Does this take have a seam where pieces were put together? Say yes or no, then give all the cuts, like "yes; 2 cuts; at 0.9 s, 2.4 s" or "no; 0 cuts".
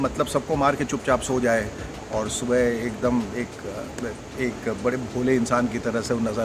no; 0 cuts